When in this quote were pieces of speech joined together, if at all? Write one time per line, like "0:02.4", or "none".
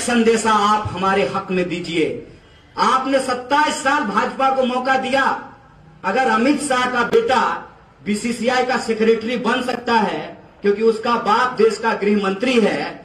0:02.3